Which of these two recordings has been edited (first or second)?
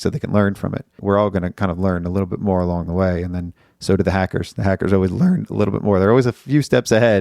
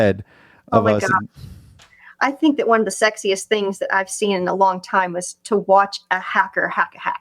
first